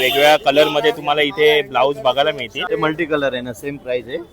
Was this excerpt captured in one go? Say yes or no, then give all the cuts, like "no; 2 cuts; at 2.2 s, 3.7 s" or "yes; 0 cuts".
no; 1 cut; at 2.5 s